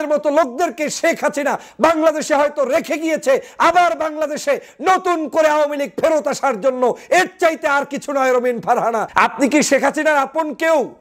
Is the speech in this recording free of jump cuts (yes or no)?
no